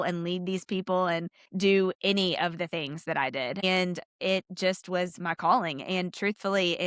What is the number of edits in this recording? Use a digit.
2